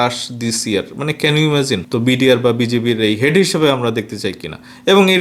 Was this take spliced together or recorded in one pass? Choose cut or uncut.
cut